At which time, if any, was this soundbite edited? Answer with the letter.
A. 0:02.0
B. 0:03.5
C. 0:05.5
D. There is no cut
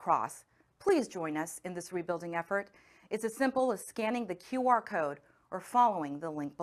D